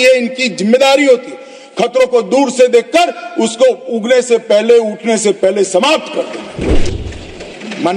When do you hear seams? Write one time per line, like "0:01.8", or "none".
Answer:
0:06.9